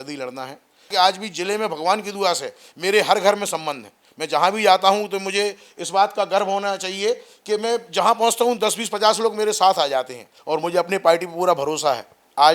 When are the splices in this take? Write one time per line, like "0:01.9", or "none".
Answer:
0:00.9
0:10.3